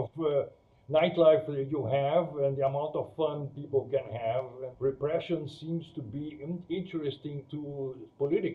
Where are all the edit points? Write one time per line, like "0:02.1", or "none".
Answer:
0:04.6

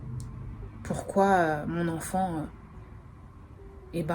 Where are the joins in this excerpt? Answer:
none

